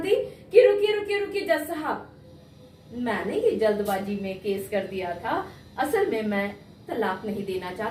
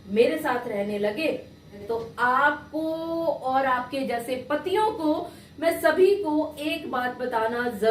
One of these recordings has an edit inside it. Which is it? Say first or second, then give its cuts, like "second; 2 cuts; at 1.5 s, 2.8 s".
second; 1 cut; at 1.8 s